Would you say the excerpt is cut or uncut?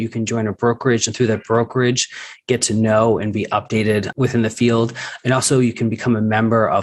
cut